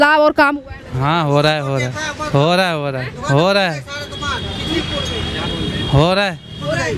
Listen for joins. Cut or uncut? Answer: uncut